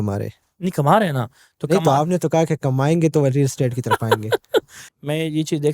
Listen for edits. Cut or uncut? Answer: cut